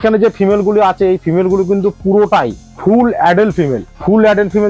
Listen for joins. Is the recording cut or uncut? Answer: uncut